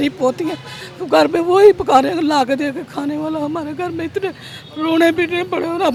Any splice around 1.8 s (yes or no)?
no